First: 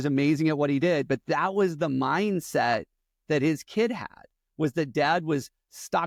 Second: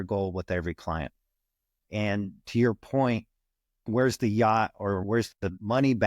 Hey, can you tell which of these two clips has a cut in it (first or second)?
second